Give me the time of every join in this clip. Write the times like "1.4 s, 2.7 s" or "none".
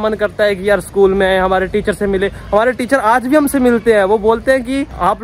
none